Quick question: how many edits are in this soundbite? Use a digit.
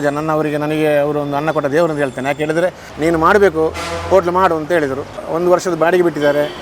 2